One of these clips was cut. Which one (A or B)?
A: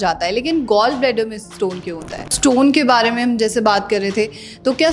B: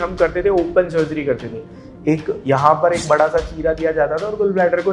A